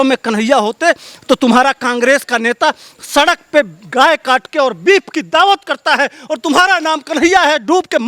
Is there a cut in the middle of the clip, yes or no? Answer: no